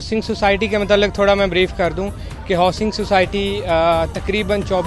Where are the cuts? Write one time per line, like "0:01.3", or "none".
none